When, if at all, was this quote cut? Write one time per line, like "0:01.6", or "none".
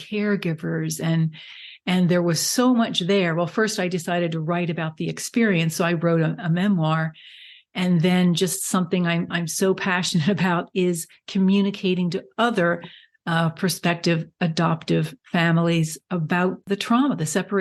0:16.6

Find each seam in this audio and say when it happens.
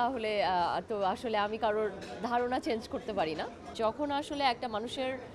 0:03.7

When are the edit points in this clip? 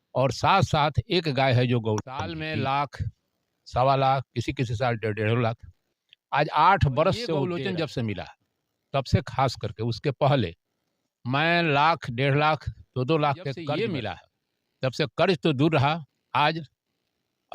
0:02.3
0:07.5
0:13.8

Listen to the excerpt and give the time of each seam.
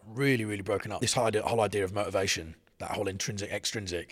0:01.0

